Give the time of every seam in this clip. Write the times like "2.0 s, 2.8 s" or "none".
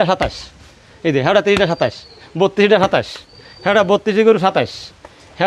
none